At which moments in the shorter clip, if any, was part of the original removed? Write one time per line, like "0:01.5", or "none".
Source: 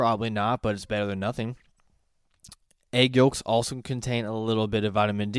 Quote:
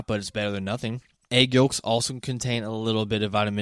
0:01.1